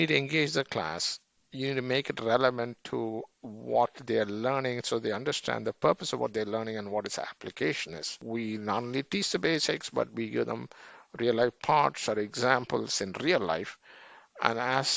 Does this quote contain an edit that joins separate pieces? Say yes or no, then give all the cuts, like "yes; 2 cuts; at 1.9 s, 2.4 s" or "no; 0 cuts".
yes; 1 cut; at 8.2 s